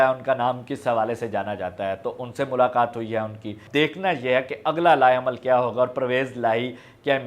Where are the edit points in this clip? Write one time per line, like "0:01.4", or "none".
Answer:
0:03.6